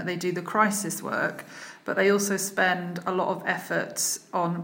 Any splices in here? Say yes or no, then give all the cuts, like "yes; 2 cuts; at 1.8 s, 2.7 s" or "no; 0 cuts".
no; 0 cuts